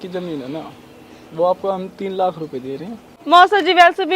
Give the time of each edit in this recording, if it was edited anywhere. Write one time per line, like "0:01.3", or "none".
0:03.2